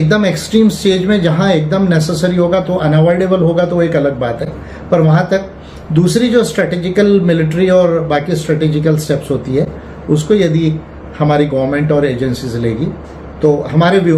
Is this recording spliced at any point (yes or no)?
no